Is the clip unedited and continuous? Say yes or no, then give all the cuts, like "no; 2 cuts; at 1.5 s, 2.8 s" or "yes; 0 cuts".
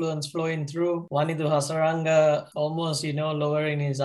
no; 2 cuts; at 1.0 s, 2.5 s